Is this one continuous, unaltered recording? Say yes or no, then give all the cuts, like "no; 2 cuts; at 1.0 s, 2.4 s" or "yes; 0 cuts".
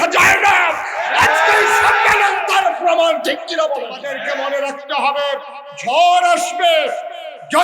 no; 1 cut; at 4.1 s